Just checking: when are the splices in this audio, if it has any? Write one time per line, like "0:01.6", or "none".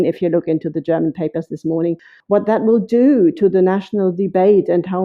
0:02.1